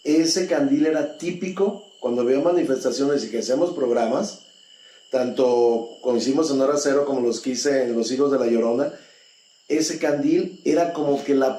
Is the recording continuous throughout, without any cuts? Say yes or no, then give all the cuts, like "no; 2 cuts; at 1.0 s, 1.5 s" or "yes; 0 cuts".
yes; 0 cuts